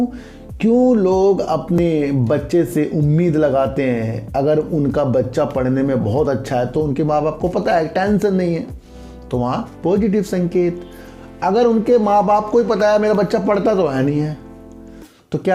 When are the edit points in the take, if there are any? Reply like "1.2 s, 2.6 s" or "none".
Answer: none